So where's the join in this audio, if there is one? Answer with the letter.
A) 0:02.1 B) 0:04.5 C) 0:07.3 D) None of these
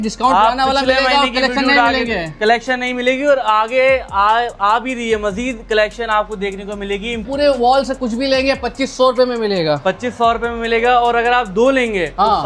C